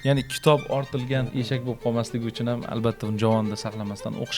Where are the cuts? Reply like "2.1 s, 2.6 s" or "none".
1.3 s